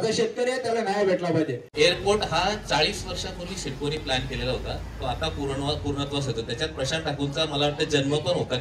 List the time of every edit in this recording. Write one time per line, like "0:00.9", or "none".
0:01.7